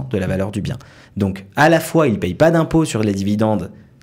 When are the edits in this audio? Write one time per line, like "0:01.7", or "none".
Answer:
none